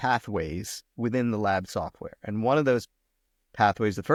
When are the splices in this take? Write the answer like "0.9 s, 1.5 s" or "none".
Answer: none